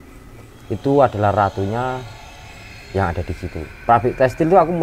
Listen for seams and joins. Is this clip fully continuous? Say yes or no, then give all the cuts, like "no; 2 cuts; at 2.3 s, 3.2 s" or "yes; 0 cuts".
no; 1 cut; at 3.7 s